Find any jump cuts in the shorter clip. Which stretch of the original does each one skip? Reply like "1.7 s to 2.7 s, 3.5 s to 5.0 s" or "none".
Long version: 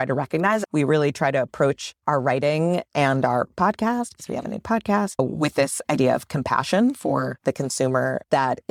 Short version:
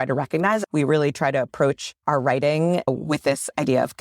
2.8 s to 5.1 s